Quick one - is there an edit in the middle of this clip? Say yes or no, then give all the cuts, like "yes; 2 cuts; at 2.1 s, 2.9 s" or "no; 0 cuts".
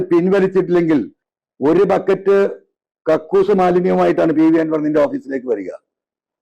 yes; 1 cut; at 1.2 s